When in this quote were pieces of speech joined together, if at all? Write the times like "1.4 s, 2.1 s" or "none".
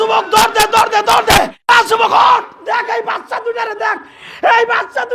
1.6 s